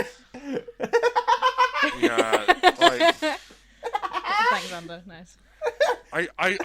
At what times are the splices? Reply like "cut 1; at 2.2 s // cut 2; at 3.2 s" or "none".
cut 1; at 3.2 s